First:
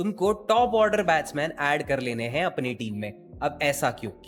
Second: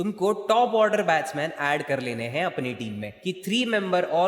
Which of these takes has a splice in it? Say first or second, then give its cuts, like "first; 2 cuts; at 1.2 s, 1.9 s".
second; 1 cut; at 3.2 s